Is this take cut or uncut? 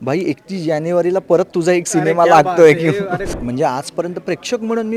cut